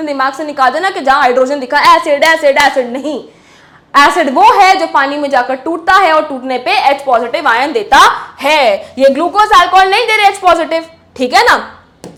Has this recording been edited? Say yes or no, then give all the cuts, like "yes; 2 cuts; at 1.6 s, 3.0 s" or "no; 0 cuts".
no; 0 cuts